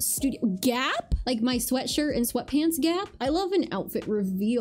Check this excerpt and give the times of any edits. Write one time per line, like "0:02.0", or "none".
0:03.2